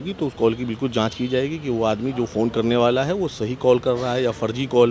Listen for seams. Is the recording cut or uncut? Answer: uncut